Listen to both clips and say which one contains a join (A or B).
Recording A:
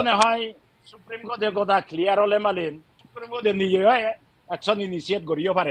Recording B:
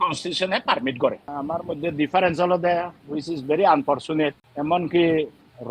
B